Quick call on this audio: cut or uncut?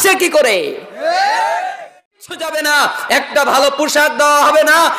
cut